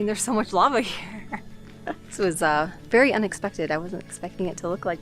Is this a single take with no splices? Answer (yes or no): no